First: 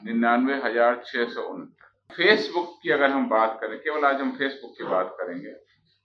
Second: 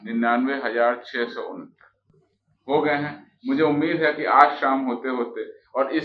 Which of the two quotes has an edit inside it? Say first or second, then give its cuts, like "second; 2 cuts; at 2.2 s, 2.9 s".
first; 1 cut; at 2.1 s